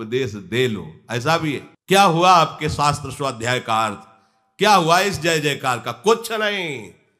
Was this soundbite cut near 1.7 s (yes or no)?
yes